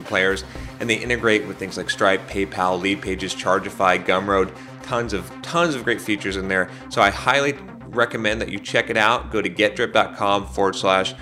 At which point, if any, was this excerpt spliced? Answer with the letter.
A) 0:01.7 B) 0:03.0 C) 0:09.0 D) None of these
D